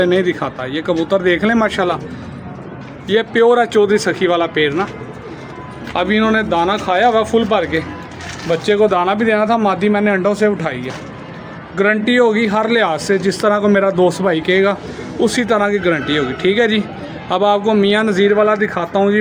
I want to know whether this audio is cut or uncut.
uncut